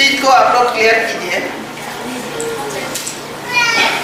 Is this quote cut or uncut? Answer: uncut